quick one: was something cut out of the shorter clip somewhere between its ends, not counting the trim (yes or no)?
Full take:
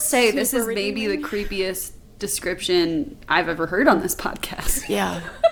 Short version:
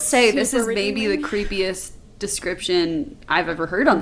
no